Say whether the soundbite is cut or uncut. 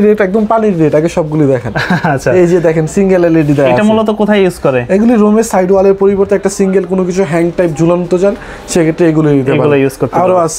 uncut